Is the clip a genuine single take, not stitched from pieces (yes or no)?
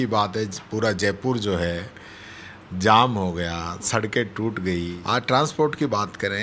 no